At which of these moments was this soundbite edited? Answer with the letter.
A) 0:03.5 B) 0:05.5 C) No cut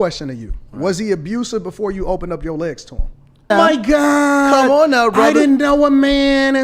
A